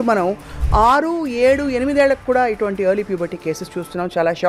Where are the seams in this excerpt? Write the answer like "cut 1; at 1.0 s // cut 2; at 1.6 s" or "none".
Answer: none